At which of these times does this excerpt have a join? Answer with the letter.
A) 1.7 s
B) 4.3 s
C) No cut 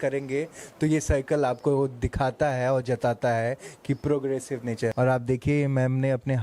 B